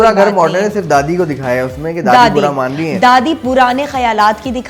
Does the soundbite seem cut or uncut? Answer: uncut